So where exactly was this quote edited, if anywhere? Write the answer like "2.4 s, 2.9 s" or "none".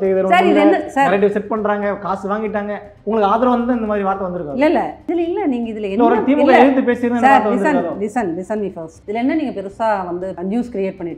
8.9 s, 10.3 s